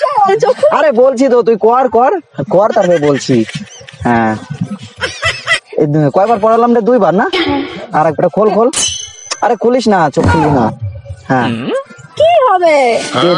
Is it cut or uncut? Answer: uncut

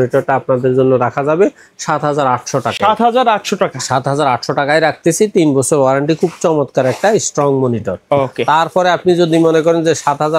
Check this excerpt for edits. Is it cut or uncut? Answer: uncut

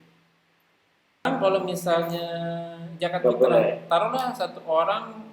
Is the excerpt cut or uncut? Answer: uncut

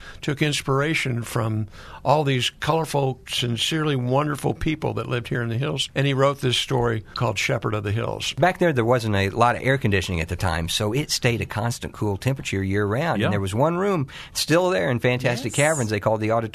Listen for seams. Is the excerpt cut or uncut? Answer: cut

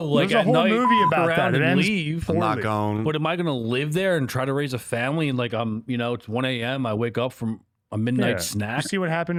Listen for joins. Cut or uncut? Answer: uncut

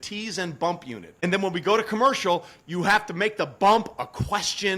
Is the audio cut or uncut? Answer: cut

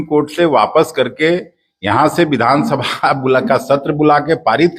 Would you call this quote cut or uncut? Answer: uncut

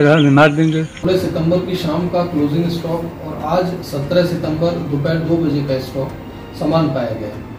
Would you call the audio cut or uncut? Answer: cut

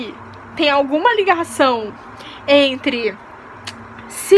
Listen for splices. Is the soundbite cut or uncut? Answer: uncut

